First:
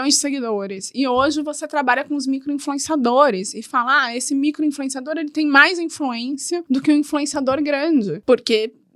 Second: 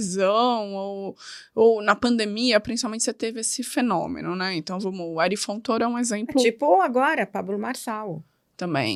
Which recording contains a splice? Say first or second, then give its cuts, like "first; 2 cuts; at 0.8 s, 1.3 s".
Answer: first; 2 cuts; at 6.6 s, 8.2 s